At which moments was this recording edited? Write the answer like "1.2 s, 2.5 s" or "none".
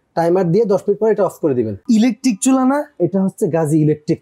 1.8 s